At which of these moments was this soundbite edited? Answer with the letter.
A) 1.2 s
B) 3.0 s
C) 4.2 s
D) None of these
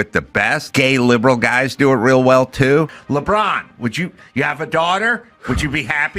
B